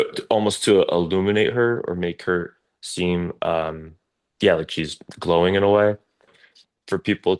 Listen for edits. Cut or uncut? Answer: cut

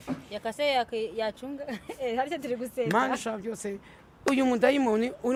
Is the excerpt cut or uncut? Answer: uncut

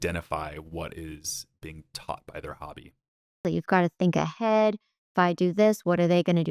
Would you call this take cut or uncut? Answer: cut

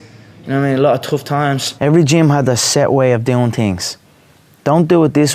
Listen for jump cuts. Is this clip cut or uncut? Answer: cut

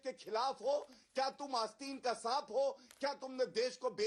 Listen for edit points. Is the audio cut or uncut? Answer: uncut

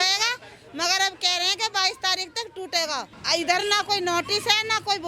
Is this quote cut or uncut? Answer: uncut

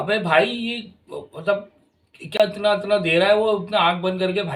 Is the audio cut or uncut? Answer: cut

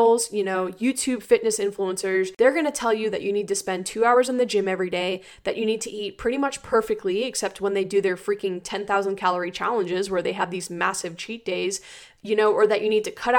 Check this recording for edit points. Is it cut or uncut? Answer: cut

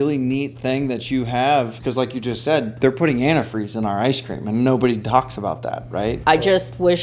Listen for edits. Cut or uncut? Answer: cut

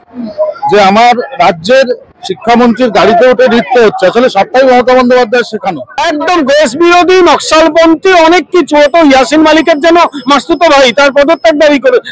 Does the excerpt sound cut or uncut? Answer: cut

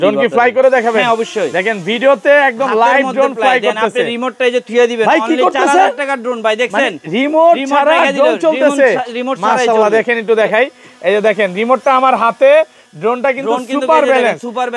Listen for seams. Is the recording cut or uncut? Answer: uncut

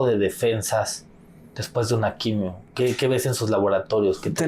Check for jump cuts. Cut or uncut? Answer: uncut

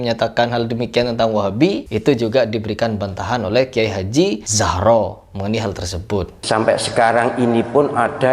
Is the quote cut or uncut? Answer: cut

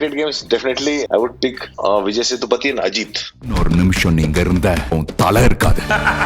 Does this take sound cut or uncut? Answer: uncut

